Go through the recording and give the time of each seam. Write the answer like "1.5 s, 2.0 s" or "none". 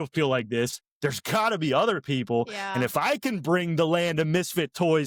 none